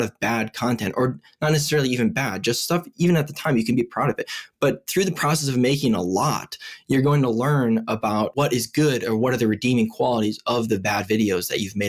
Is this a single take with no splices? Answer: no; 1 cut; at 8.3 s

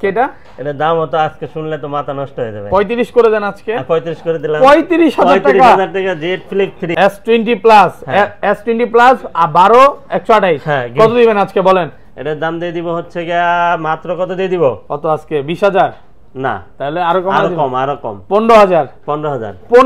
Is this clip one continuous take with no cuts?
no; 1 cut; at 6.8 s

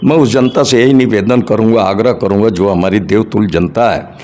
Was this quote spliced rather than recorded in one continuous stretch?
no; 0 cuts

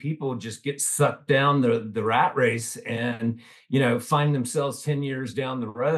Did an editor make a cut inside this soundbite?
no; 0 cuts

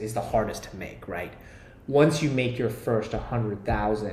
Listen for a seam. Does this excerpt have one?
no; 0 cuts

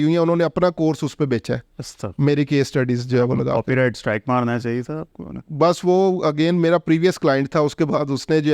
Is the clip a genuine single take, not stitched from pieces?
yes; 0 cuts

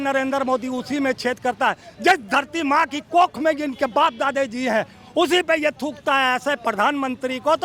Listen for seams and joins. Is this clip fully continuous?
yes; 0 cuts

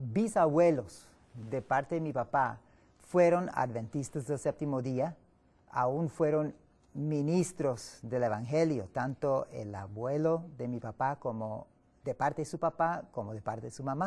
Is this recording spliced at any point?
no; 0 cuts

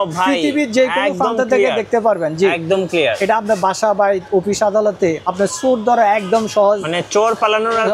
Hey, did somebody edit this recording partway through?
no; 0 cuts

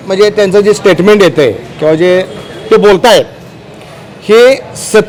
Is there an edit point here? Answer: no; 0 cuts

